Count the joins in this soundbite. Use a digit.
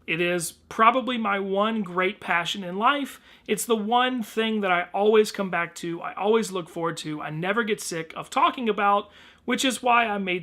1